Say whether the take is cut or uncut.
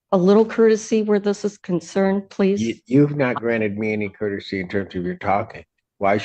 uncut